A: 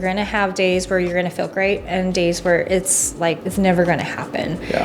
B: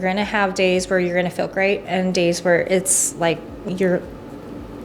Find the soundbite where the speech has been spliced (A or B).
A